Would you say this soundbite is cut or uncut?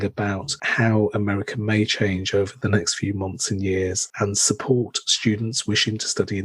cut